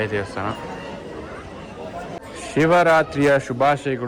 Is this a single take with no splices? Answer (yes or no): yes